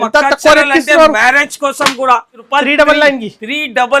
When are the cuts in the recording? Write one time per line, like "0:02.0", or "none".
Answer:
0:02.4